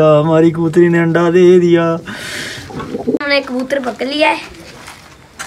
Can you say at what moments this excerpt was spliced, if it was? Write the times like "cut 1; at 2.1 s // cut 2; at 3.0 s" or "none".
cut 1; at 3.2 s